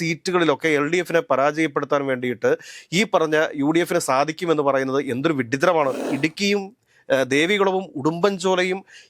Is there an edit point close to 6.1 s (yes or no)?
yes